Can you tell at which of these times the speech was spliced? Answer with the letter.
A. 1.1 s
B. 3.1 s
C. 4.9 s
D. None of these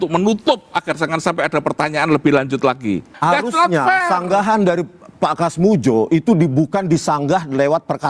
B